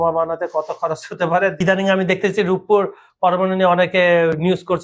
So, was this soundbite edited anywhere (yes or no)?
yes